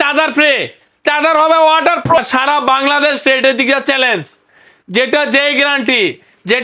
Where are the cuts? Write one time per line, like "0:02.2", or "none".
0:02.2